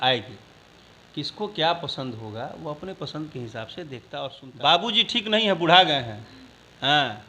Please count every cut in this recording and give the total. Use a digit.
1